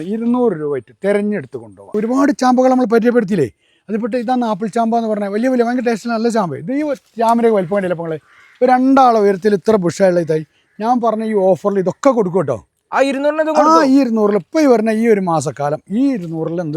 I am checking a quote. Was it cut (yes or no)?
yes